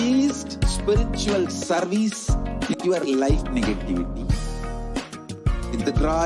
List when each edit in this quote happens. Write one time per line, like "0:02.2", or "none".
0:02.7